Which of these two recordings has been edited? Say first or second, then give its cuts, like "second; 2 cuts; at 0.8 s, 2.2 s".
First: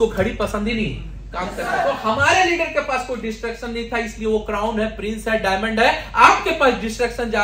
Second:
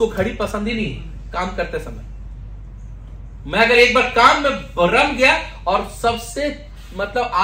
first; 1 cut; at 1.6 s